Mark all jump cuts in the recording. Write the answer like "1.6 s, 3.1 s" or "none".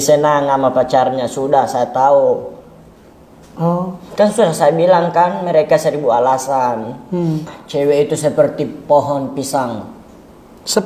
7.6 s